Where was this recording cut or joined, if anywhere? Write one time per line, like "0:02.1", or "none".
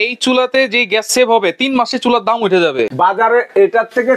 0:02.9